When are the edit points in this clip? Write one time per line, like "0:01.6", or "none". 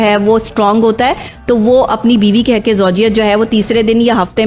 none